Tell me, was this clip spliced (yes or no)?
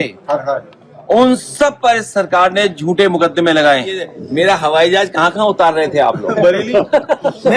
yes